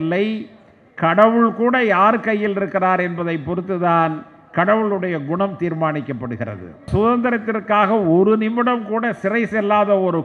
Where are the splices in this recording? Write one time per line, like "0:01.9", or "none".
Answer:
0:06.9